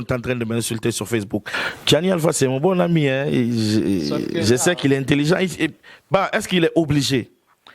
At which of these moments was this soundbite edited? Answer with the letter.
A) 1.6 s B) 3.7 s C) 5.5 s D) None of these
A